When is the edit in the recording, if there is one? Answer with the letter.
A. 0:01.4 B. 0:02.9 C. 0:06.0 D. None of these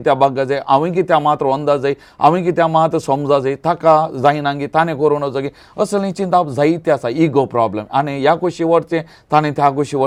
D